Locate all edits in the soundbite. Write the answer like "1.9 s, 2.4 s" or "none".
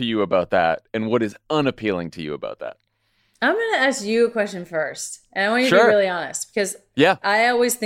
none